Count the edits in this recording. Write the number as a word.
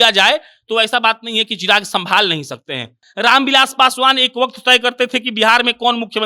one